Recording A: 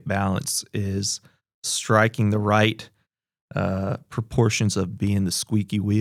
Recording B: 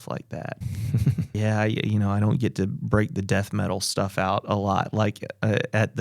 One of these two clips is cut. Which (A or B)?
B